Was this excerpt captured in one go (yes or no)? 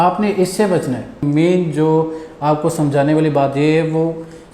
no